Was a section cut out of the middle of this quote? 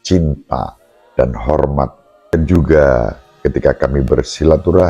yes; 1 cut; at 2.3 s

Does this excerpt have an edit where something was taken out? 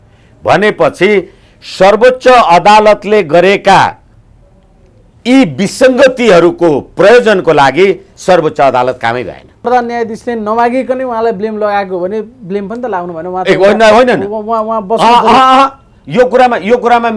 yes; 1 cut; at 9.6 s

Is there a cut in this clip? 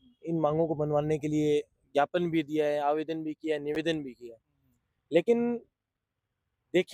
no; 0 cuts

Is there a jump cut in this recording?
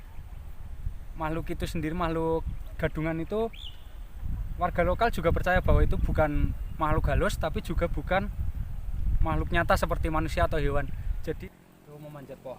yes; 1 cut; at 11.4 s

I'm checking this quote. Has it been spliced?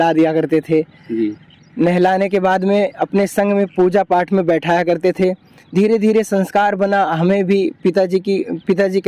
no; 0 cuts

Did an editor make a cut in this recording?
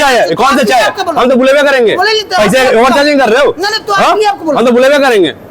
no; 0 cuts

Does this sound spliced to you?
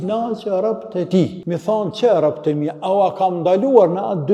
yes; 1 cut; at 1.4 s

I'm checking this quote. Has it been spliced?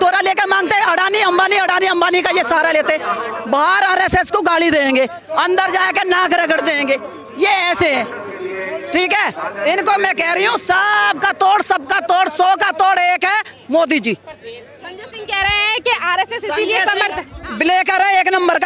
no; 0 cuts

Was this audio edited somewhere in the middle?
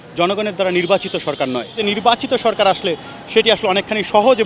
yes; 1 cut; at 1.7 s

